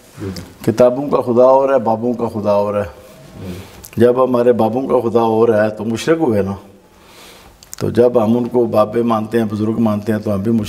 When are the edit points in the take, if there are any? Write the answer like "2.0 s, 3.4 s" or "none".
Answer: none